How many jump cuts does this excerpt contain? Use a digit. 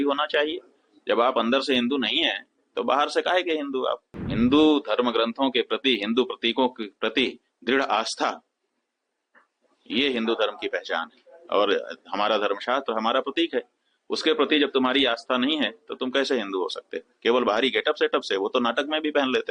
1